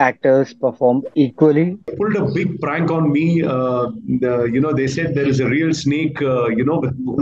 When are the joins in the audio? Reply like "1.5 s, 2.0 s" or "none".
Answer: 1.8 s